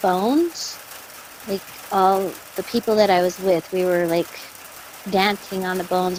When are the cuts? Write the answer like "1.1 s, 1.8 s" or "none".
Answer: none